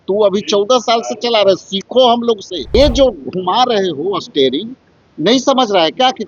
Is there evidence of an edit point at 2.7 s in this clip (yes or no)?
yes